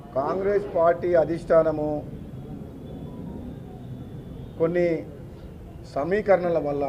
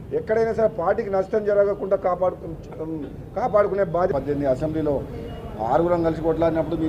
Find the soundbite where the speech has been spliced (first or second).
second